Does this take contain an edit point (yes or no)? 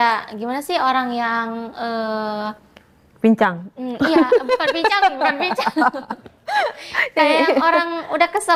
no